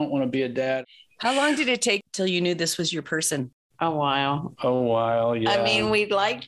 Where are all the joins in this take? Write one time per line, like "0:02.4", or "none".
0:00.8
0:02.0

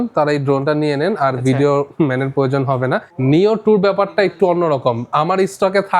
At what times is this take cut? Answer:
0:03.1

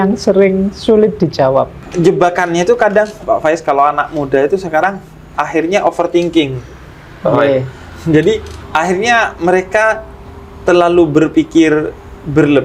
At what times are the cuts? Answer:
0:01.8

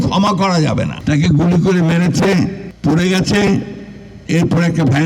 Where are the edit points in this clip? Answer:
0:01.0
0:02.7

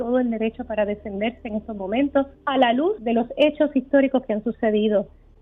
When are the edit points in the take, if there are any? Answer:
0:02.4
0:03.0

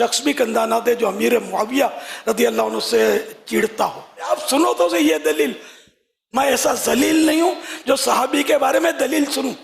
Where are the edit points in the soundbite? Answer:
0:04.3

